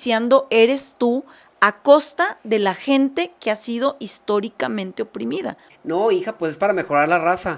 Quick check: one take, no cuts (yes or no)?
no